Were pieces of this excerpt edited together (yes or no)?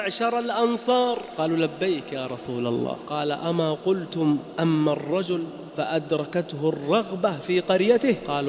yes